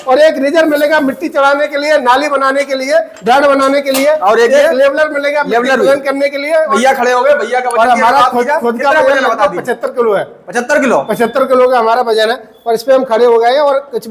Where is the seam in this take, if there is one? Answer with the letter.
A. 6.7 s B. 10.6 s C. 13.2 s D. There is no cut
A